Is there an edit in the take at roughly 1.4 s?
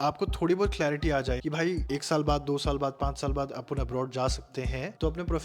yes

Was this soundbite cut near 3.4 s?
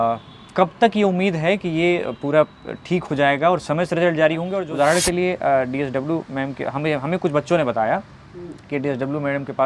no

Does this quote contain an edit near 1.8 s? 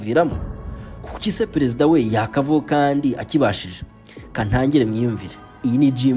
no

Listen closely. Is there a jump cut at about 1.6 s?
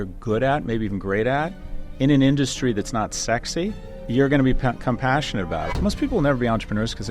no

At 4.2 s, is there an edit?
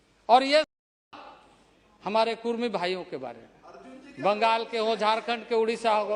no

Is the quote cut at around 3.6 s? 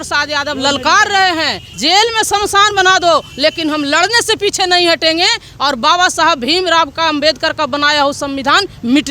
no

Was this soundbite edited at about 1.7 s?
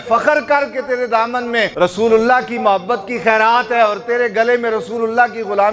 yes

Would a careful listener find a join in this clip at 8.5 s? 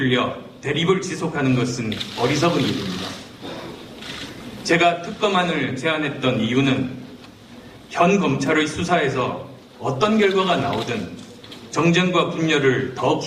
yes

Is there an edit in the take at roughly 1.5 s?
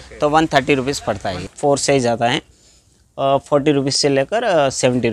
yes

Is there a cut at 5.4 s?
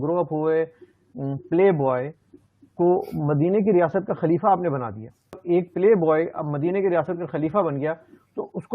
yes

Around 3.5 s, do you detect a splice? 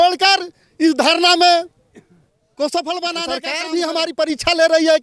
yes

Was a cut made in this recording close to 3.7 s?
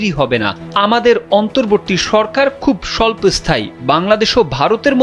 no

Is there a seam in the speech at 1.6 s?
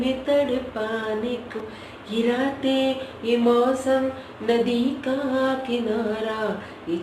yes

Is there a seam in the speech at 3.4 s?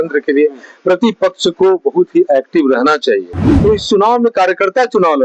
yes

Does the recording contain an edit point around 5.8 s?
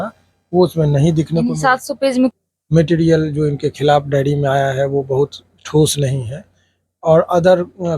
no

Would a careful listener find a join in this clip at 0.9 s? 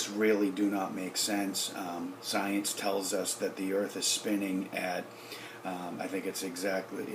no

